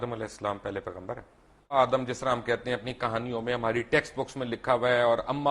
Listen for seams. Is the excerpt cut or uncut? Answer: cut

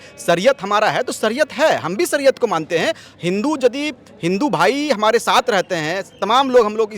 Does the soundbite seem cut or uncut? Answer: uncut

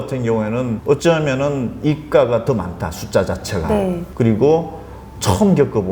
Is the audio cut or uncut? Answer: cut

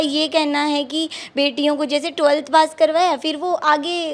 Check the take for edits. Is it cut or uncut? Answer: uncut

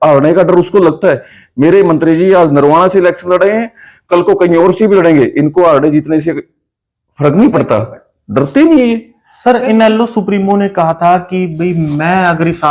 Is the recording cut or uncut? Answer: uncut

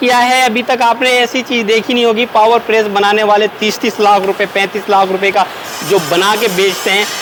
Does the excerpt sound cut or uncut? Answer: uncut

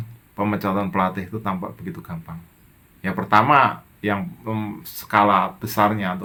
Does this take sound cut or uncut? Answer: uncut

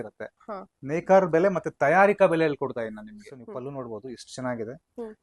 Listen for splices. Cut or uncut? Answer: cut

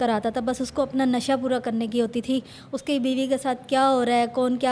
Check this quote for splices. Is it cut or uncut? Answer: uncut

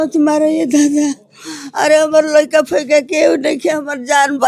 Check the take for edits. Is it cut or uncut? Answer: uncut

